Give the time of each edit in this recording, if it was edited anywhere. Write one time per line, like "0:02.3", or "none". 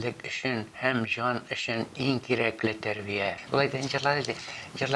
0:03.4